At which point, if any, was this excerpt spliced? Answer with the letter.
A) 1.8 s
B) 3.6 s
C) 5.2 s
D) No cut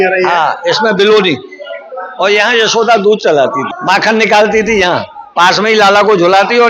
B